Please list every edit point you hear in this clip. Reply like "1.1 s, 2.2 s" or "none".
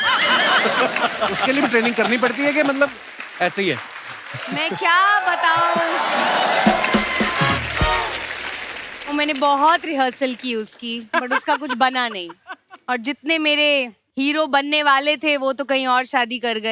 none